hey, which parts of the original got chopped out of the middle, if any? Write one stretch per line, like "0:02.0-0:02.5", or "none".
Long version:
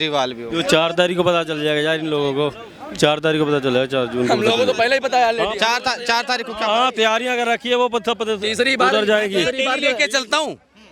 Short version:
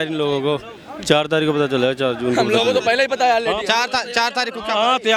none